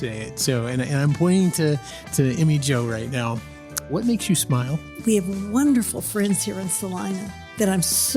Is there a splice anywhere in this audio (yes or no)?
yes